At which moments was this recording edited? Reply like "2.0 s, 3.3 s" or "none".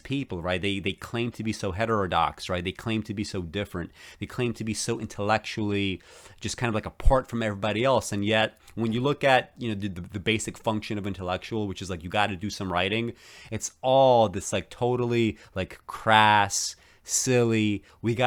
none